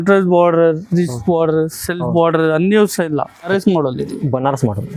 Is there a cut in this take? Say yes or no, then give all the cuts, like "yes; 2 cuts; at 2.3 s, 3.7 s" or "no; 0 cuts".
yes; 1 cut; at 3.5 s